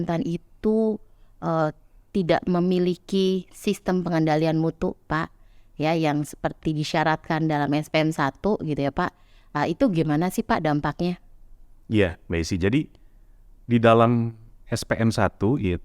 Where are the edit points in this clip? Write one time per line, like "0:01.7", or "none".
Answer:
none